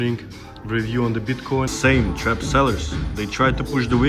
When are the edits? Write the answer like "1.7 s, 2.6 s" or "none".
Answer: 1.7 s